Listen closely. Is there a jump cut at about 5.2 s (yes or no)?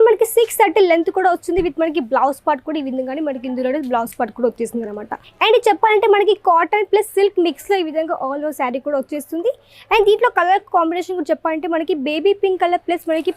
yes